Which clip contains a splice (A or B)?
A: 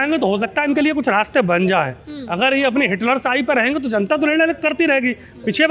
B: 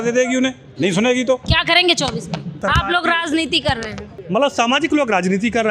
B